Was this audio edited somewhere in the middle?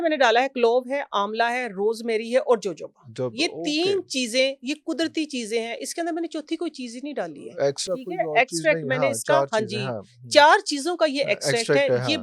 no; 0 cuts

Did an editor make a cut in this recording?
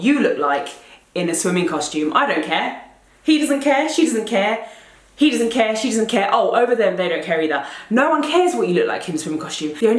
no; 0 cuts

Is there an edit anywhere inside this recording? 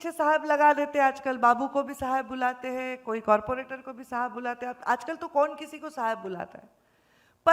no; 0 cuts

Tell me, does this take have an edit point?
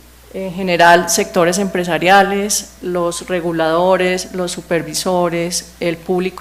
yes; 1 cut; at 3.1 s

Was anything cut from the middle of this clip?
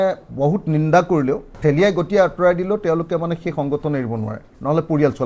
yes; 1 cut; at 1.6 s

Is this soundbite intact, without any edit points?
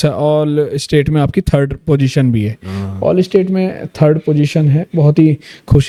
yes; 0 cuts

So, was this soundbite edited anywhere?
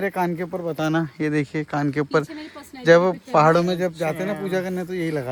no; 0 cuts

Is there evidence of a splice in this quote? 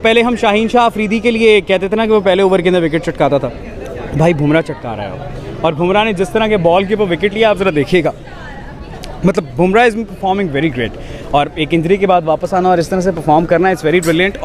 no; 0 cuts

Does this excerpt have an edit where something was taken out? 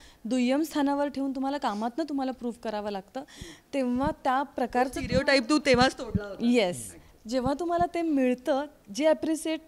no; 0 cuts

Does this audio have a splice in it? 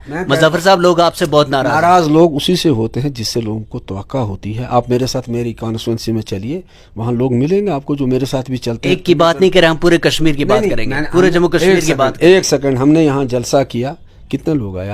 no; 0 cuts

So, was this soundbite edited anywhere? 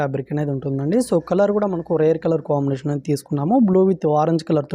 no; 0 cuts

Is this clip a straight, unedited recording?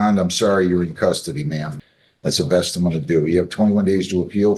no; 1 cut; at 1.7 s

